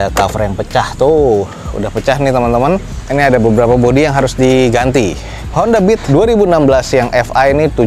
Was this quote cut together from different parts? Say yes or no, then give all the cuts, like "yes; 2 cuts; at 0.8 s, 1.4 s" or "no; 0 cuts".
no; 0 cuts